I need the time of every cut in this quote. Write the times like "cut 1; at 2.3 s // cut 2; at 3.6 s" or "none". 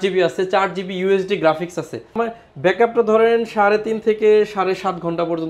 cut 1; at 2.1 s